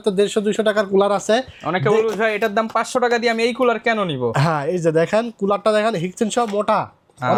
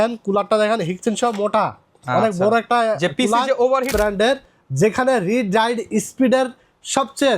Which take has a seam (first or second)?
second